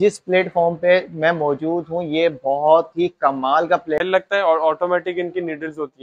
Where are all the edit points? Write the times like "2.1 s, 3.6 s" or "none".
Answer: 4.0 s